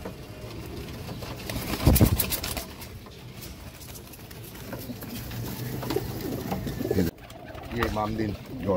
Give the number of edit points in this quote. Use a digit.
1